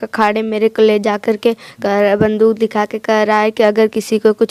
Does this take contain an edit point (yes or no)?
no